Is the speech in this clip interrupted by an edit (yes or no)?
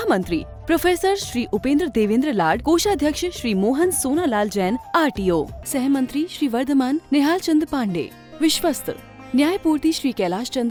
no